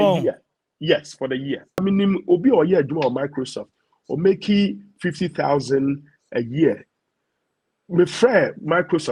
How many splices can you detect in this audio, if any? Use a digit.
1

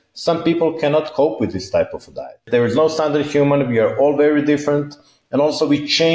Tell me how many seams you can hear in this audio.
1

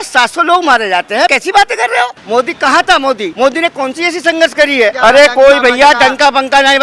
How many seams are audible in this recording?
4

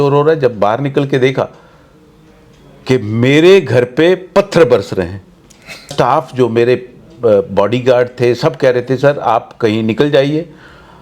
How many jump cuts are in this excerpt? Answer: 1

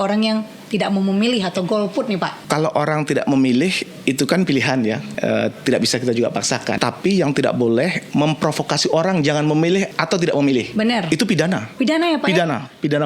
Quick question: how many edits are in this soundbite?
5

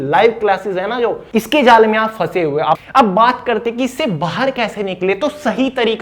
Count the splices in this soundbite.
2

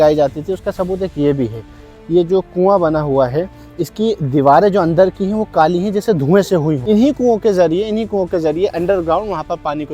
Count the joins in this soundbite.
1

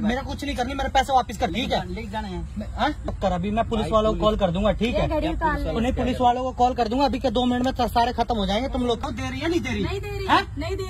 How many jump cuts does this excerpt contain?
3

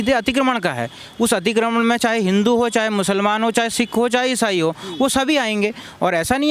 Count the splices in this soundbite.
0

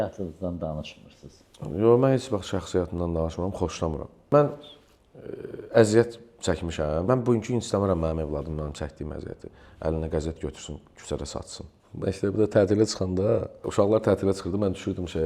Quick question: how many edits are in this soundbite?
4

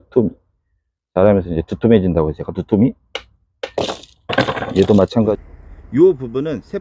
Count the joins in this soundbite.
1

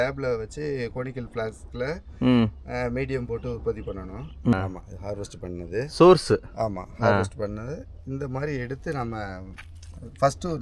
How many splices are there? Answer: 1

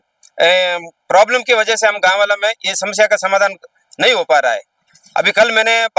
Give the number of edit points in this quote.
0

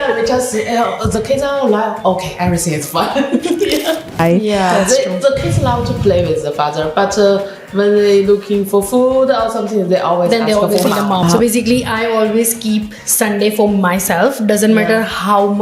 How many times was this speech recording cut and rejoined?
2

